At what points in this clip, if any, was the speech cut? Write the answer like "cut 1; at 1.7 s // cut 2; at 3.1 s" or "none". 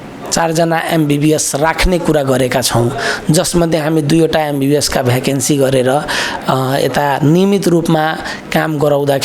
none